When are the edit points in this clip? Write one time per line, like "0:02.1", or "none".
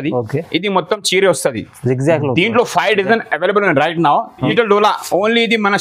0:04.4